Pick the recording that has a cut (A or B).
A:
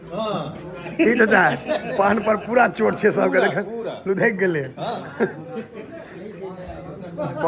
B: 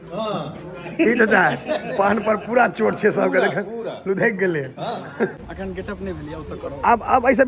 B